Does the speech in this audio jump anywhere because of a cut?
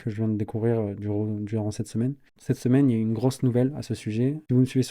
yes; 1 cut; at 2.3 s

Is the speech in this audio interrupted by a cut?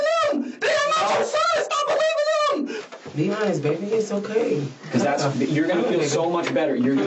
yes; 1 cut; at 2.8 s

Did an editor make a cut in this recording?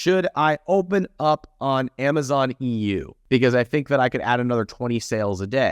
yes; 1 cut; at 3.1 s

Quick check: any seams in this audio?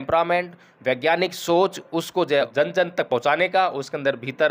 yes; 1 cut; at 2.5 s

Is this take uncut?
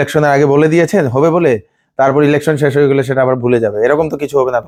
yes; 0 cuts

